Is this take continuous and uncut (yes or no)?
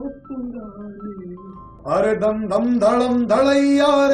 no